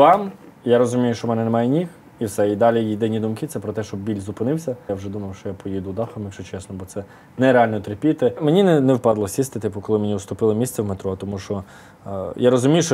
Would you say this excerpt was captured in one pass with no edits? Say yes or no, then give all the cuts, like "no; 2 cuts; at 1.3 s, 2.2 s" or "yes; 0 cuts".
no; 2 cuts; at 4.9 s, 8.4 s